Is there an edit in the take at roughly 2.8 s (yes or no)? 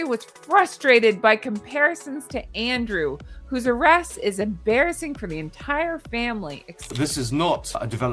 no